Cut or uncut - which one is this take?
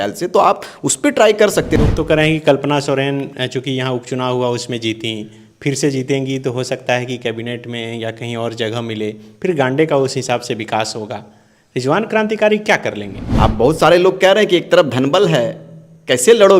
cut